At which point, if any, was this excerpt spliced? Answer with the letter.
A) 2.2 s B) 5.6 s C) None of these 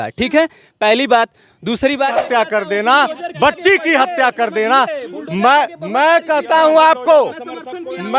A